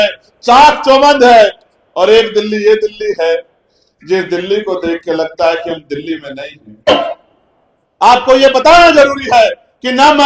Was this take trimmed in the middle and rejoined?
yes; 1 cut; at 6.9 s

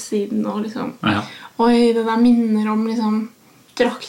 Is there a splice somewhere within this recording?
no; 0 cuts

